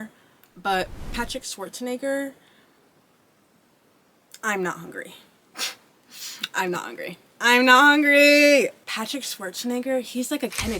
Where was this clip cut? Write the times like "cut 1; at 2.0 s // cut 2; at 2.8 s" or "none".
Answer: cut 1; at 5.5 s // cut 2; at 8.8 s